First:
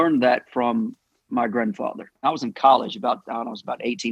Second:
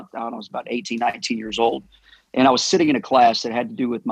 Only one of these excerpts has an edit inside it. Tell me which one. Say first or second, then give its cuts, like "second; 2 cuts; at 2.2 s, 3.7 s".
first; 1 cut; at 2.1 s